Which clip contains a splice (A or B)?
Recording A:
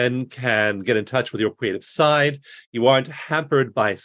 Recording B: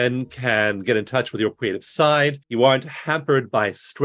B